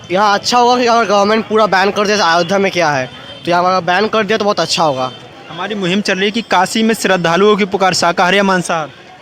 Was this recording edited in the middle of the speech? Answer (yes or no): no